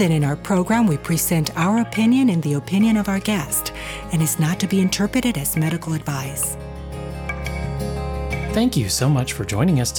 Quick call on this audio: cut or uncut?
cut